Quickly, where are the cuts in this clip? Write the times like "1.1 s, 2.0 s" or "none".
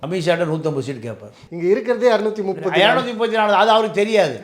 1.4 s